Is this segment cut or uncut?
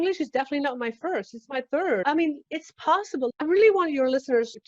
cut